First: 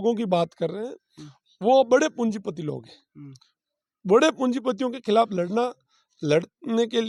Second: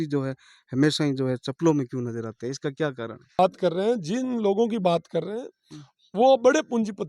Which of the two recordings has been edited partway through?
second; 1 cut; at 3.4 s

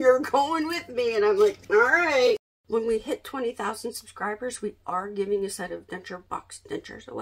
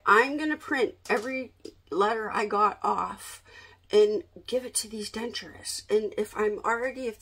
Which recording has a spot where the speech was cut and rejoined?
first; 3 cuts; at 1.6 s, 2.5 s, 6.2 s

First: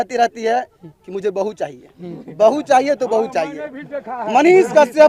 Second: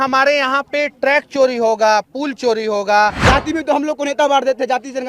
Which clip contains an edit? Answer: second; 1 cut; at 3.2 s

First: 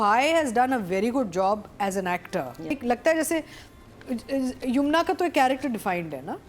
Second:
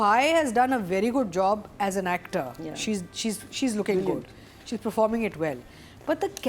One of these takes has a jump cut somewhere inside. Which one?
first; 1 cut; at 2.7 s

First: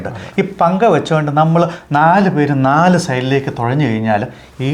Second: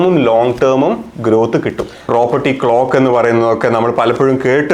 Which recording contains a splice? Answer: second; 1 cut; at 2.1 s

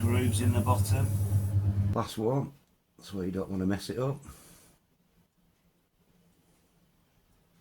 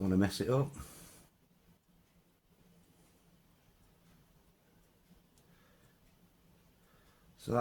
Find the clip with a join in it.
first; 1 cut; at 1.9 s

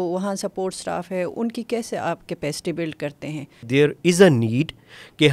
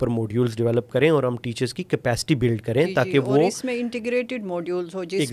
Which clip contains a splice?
first; 1 cut; at 3.7 s

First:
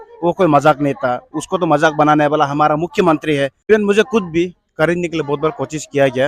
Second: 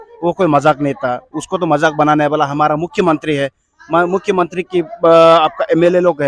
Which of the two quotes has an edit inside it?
first; 1 cut; at 3.7 s

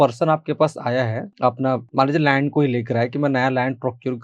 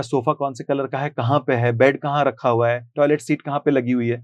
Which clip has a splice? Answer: first; 1 cut; at 1.8 s

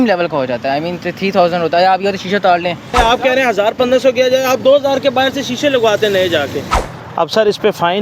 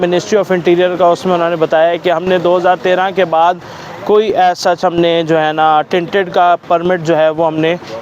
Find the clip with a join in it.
first; 2 cuts; at 2.9 s, 6.7 s

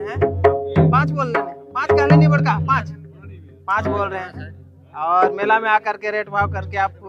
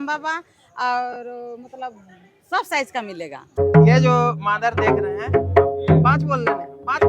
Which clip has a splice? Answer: second; 1 cut; at 3.6 s

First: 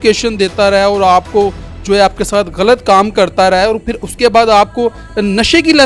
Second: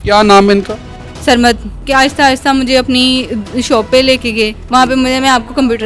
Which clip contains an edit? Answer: second; 2 cuts; at 1.8 s, 4.6 s

